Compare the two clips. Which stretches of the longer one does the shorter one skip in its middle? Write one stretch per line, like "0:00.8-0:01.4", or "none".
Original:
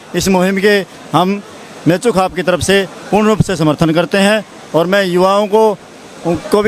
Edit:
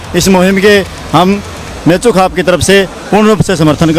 none